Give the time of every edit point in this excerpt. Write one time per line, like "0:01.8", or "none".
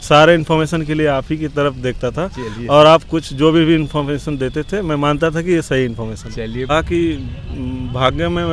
0:06.7